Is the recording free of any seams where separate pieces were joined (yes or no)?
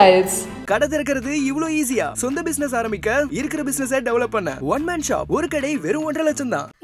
yes